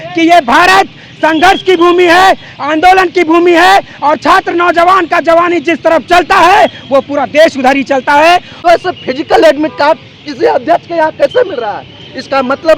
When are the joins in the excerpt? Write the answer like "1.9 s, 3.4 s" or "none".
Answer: 8.6 s